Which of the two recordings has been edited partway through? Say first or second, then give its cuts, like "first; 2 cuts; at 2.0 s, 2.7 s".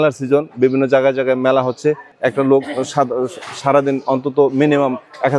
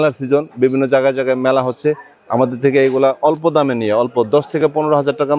first; 1 cut; at 2.1 s